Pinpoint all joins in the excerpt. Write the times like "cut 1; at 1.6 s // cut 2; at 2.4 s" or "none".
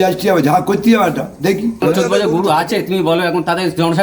cut 1; at 1.8 s